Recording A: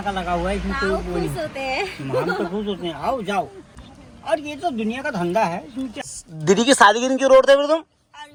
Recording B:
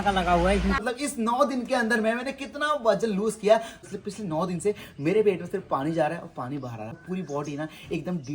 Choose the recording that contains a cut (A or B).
B